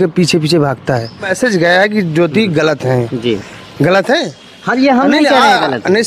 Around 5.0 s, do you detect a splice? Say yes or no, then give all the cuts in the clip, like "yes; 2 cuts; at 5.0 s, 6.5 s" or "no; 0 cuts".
no; 1 cut; at 1.3 s